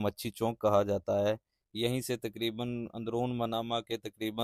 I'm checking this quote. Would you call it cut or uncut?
uncut